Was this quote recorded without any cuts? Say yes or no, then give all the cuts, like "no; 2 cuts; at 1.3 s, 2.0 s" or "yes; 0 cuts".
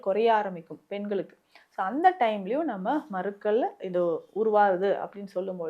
yes; 0 cuts